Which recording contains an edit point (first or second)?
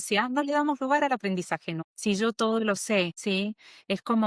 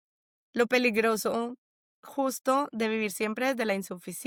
first